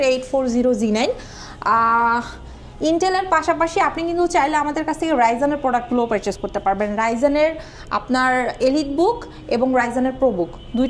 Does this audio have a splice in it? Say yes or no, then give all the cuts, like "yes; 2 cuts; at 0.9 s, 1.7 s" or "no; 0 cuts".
no; 0 cuts